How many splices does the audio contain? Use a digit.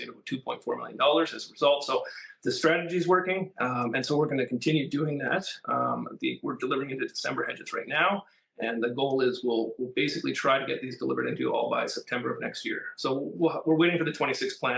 0